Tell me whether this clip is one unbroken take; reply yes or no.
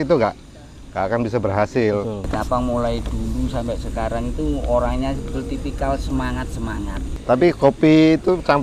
no